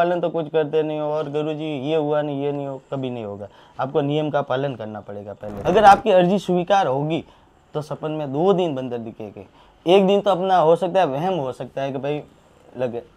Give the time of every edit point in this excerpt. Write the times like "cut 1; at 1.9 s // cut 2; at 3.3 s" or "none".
cut 1; at 5.5 s